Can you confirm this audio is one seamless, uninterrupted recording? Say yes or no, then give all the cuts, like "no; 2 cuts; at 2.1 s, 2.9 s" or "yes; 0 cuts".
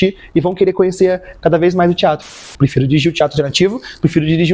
no; 1 cut; at 2.3 s